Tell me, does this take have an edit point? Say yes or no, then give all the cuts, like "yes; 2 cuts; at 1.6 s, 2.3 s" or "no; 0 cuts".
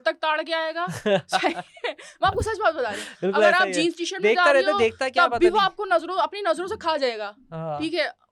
no; 0 cuts